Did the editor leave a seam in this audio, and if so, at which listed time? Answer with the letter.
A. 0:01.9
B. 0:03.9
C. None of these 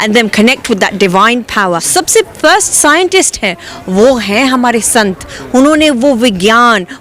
A